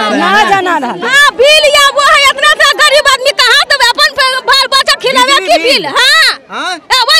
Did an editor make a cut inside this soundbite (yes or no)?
yes